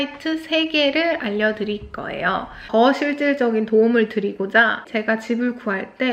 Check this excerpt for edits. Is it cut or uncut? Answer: cut